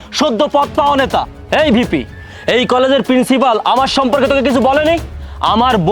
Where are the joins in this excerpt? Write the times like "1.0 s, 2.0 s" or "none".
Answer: none